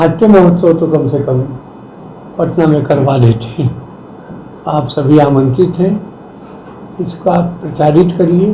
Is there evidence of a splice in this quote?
no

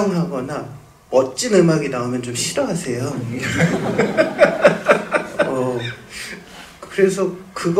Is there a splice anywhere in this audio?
no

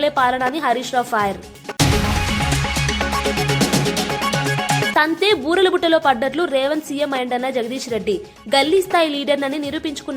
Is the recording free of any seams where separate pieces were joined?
no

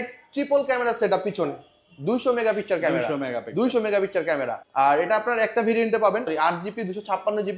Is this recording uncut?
yes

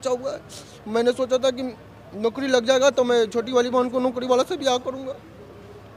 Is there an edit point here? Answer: no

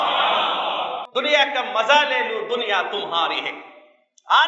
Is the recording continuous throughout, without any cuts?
no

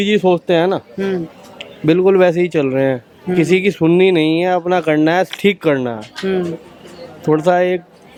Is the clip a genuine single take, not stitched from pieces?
yes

